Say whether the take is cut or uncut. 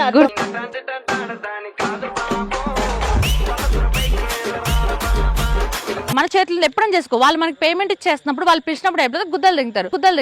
cut